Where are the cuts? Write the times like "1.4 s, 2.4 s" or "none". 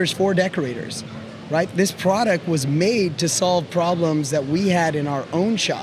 none